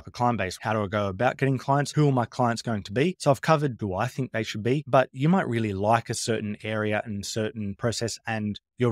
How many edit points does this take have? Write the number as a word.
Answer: one